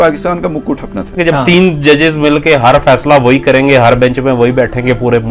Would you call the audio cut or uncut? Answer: cut